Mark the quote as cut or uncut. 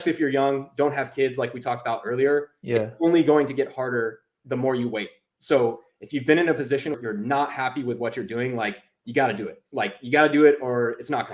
cut